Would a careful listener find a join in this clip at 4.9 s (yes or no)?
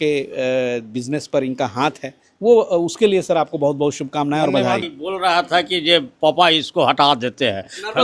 yes